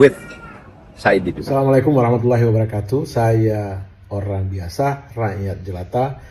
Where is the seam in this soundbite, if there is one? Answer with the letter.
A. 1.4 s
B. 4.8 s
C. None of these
A